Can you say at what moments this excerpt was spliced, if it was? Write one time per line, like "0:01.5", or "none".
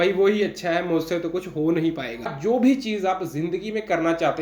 0:02.3

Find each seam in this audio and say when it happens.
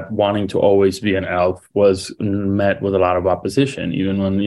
none

